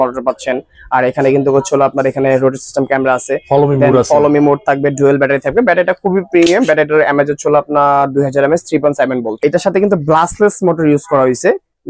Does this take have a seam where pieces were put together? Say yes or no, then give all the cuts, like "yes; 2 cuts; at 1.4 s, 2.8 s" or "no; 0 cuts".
yes; 1 cut; at 9.4 s